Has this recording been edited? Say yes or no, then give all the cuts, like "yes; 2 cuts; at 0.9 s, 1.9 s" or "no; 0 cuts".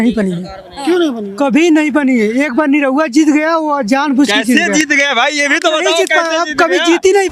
no; 0 cuts